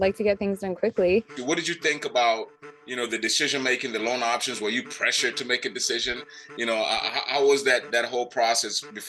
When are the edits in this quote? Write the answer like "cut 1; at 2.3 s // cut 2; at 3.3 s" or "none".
cut 1; at 1.4 s